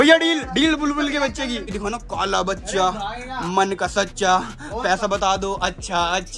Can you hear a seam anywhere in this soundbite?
yes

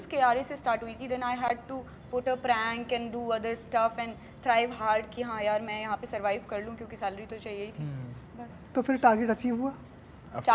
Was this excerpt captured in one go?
yes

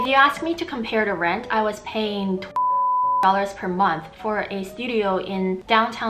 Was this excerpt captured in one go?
yes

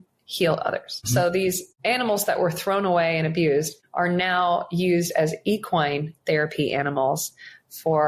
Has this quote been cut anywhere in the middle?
yes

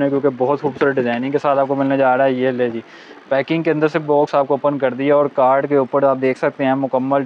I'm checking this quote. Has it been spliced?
no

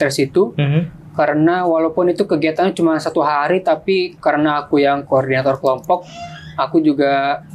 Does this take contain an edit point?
no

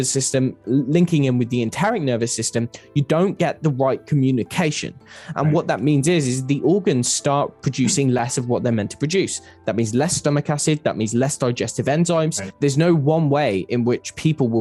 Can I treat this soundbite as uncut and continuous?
yes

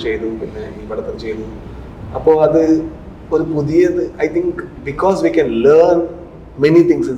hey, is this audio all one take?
yes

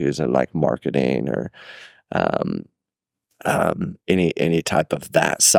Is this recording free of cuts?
yes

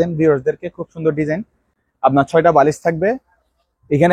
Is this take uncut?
yes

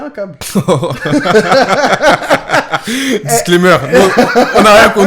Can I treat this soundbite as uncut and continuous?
yes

